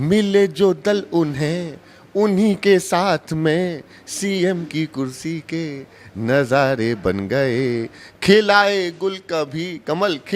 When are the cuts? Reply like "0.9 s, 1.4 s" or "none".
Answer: none